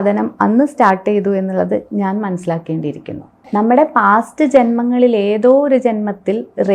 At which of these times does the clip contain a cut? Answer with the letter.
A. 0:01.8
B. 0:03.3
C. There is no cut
B